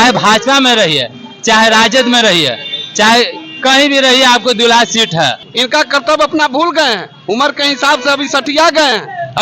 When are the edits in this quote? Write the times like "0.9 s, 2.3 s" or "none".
5.4 s